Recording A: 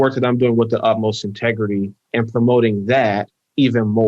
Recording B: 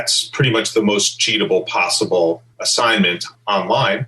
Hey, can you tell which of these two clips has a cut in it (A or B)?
B